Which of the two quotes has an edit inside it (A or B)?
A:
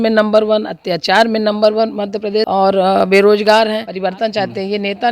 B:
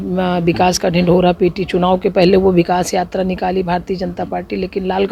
A